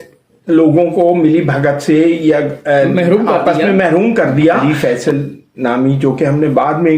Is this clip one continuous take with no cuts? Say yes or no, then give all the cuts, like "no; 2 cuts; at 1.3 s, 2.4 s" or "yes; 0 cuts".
no; 1 cut; at 4.6 s